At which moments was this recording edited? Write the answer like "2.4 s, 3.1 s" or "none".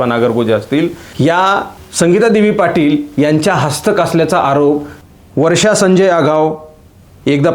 1.8 s, 5.0 s